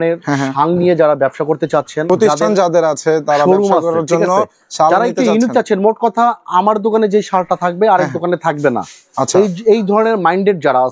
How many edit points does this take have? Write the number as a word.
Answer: one